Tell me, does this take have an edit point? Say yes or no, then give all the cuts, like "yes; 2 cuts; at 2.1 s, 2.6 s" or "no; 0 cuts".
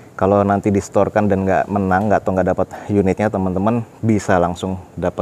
no; 0 cuts